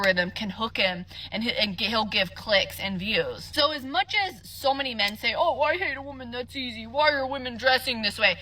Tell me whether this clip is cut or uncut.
cut